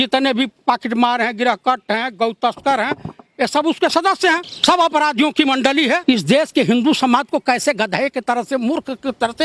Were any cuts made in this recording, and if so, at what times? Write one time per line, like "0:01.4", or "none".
0:04.5
0:06.0

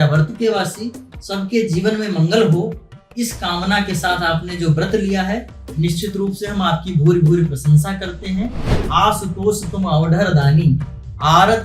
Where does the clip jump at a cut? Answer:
0:08.7

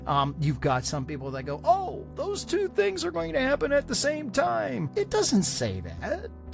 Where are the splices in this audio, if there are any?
0:04.8

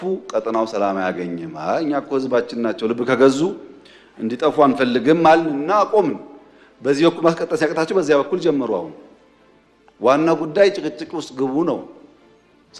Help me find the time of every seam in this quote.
none

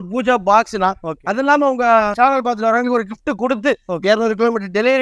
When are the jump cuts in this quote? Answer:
none

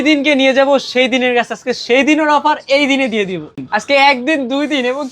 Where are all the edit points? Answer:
0:03.6

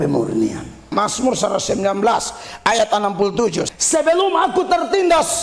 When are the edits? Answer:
0:00.9
0:03.7

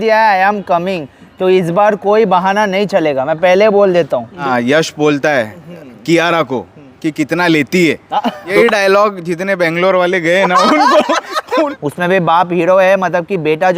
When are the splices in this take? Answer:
0:04.4
0:08.5
0:11.7

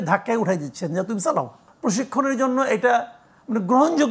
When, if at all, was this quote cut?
0:01.7

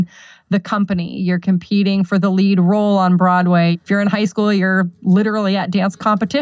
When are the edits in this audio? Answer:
0:03.9

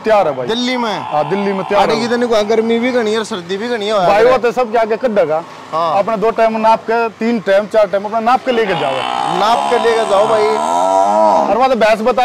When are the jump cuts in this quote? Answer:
none

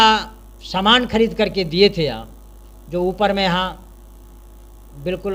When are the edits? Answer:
none

